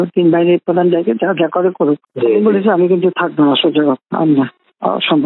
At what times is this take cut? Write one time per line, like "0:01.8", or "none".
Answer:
0:02.1